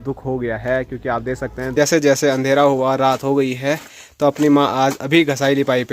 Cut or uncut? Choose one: cut